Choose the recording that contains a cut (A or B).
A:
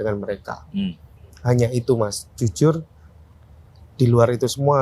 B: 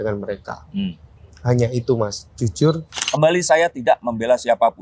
B